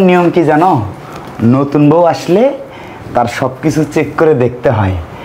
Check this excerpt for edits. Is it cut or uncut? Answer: uncut